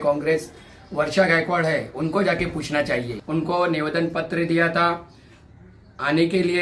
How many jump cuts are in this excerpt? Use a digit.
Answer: 1